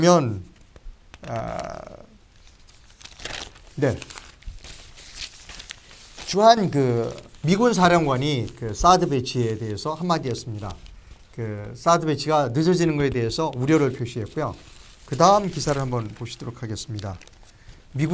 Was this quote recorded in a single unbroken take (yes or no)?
yes